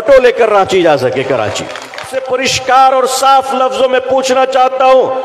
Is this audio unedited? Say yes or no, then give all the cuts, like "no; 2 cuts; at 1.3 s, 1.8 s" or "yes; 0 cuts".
no; 1 cut; at 2.1 s